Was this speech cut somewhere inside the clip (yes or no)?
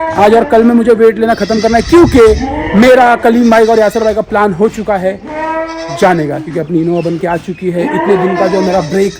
no